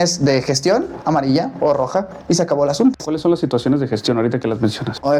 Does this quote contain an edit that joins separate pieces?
no; 0 cuts

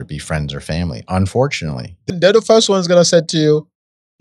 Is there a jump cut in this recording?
yes; 1 cut; at 2.1 s

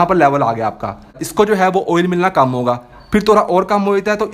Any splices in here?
yes; 1 cut; at 1.2 s

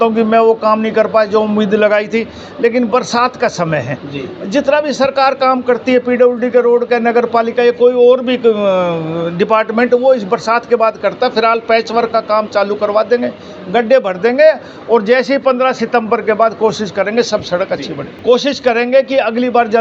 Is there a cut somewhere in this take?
no; 0 cuts

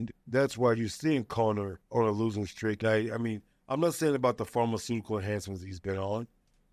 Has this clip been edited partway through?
yes; 2 cuts; at 1.8 s, 2.8 s

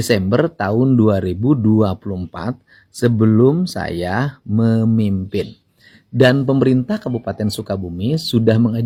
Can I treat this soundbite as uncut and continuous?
yes; 0 cuts

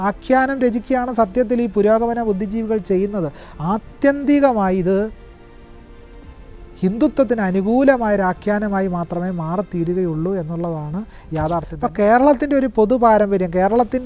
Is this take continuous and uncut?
no; 1 cut; at 11.7 s

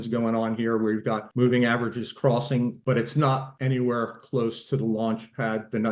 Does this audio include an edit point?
yes; 3 cuts; at 1.3 s, 2.8 s, 3.5 s

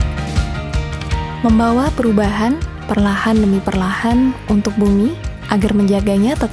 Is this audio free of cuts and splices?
yes; 0 cuts

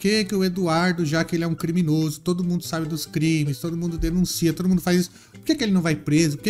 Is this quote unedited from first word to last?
yes; 0 cuts

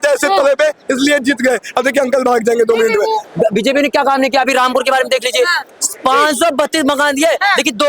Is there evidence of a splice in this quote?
yes; 1 cut; at 3.2 s

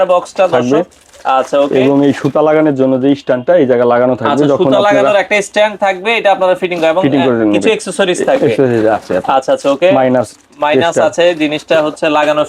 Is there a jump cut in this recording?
no; 0 cuts

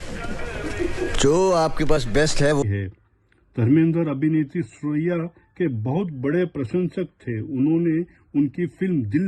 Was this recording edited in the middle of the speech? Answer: yes; 1 cut; at 2.6 s

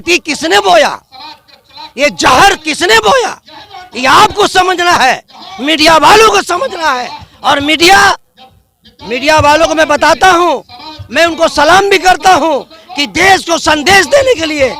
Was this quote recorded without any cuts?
yes; 0 cuts

